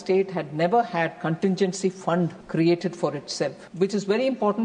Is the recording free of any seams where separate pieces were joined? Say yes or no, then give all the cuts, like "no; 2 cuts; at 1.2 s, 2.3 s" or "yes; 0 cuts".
no; 2 cuts; at 2.4 s, 3.6 s